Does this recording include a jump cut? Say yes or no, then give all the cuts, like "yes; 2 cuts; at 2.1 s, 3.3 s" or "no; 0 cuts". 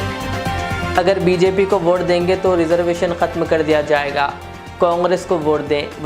yes; 1 cut; at 0.9 s